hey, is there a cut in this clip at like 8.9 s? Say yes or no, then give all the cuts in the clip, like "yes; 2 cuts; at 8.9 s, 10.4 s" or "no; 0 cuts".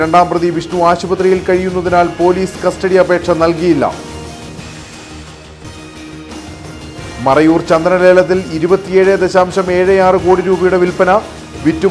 no; 0 cuts